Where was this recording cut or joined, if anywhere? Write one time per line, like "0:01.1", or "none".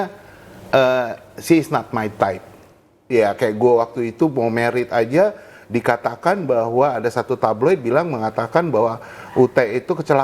0:03.0